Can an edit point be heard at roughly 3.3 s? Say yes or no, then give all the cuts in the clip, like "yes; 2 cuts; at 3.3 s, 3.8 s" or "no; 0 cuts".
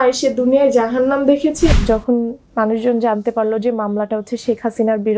no; 1 cut; at 1.7 s